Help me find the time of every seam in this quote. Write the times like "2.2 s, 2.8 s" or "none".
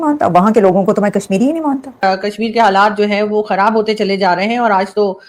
1.9 s